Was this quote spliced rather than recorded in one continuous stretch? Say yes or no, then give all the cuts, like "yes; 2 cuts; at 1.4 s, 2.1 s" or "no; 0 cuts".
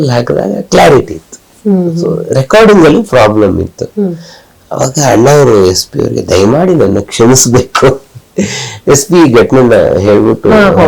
no; 0 cuts